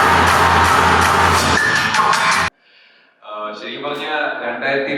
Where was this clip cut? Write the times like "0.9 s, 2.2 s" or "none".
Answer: 2.5 s

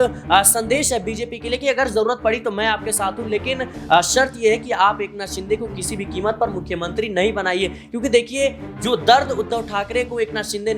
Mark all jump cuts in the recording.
none

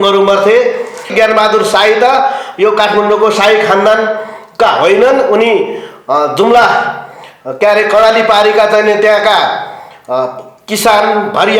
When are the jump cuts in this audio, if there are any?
1.1 s

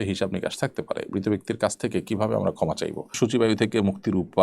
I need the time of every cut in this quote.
3.1 s

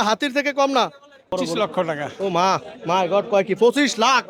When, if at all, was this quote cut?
1.3 s

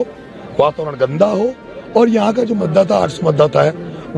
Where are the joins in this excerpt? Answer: none

